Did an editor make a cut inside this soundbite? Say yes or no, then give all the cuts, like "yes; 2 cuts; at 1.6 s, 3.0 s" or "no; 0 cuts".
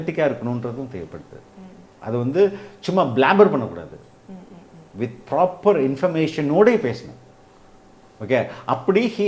no; 0 cuts